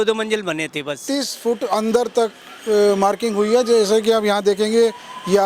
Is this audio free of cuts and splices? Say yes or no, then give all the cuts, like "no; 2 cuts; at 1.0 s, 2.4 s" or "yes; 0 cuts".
no; 1 cut; at 1.0 s